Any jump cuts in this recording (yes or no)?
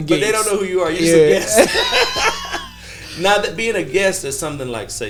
no